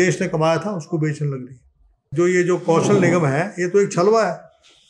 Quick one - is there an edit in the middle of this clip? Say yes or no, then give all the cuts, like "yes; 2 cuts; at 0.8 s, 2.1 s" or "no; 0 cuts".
yes; 1 cut; at 2.0 s